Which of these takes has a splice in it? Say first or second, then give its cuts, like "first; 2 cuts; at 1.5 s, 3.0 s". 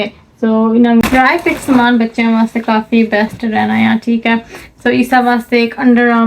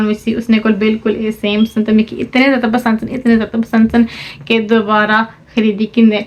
first; 1 cut; at 1.0 s